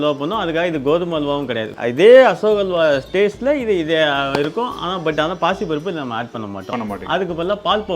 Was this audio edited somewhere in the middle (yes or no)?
yes